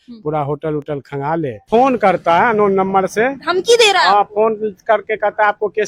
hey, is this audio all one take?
no; 1 cut; at 1.6 s

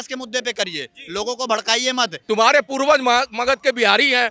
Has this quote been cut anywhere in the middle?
yes; 1 cut; at 2.2 s

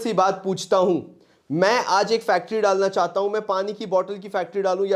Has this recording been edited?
no; 0 cuts

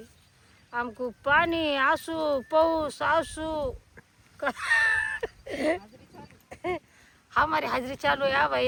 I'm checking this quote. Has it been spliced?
no; 0 cuts

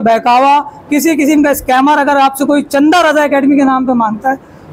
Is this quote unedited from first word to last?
yes; 0 cuts

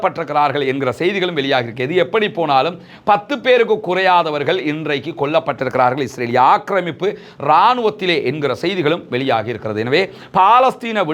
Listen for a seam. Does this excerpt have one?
no; 0 cuts

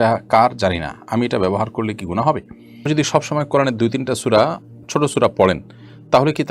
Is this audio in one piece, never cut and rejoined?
no; 1 cut; at 2.9 s

